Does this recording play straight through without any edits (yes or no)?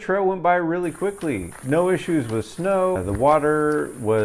no